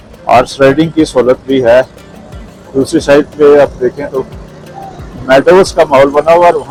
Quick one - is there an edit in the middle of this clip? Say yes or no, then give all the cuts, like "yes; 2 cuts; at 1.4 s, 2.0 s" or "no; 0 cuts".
no; 0 cuts